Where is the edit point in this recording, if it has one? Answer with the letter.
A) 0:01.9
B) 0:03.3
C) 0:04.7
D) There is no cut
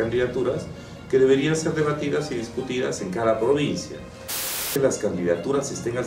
C